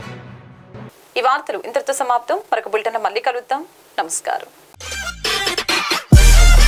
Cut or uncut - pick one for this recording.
uncut